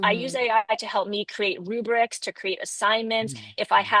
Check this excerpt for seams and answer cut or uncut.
uncut